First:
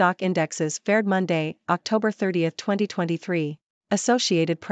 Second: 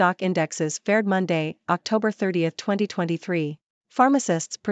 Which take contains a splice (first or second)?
second